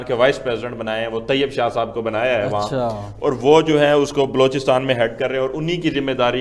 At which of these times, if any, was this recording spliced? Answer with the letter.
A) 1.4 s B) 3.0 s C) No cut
C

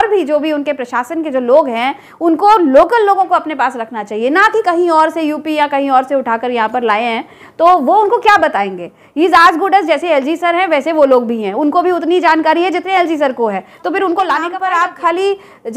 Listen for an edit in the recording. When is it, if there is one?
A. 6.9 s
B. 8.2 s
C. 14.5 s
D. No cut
C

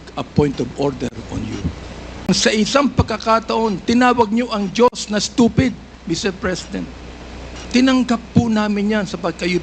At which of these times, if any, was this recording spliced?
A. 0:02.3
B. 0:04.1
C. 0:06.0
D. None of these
A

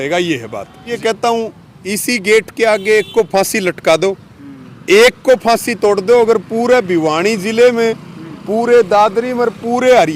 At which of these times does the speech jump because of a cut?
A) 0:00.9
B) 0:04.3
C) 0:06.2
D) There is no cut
A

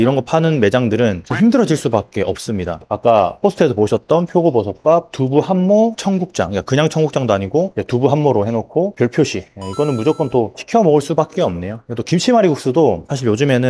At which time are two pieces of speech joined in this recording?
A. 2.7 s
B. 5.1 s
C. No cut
C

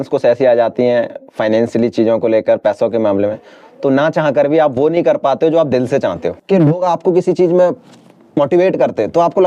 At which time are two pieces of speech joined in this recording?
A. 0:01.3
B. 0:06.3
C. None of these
B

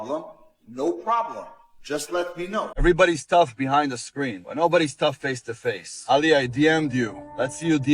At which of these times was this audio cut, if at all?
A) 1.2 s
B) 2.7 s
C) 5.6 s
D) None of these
B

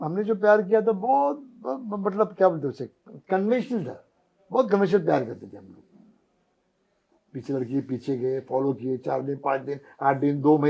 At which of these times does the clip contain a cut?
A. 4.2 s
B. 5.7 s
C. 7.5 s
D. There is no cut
D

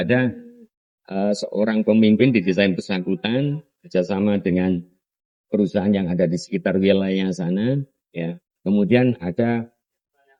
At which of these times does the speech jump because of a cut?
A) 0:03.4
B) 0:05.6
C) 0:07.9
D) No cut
D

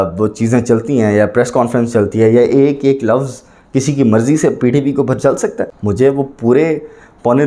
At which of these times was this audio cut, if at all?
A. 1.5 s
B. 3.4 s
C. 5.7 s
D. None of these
C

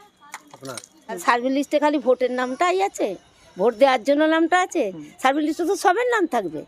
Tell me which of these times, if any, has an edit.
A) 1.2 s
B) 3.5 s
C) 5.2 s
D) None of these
A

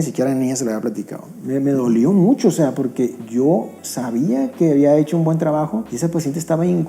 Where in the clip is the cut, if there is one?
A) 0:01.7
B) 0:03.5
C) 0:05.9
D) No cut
C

